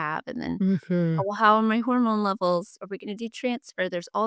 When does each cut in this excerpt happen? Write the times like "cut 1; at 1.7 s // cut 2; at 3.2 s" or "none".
cut 1; at 2.8 s